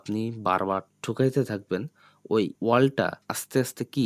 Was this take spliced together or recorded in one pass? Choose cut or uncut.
uncut